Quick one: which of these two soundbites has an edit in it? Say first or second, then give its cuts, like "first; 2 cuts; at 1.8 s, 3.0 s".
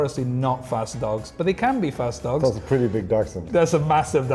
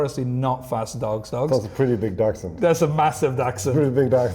second; 1 cut; at 1.3 s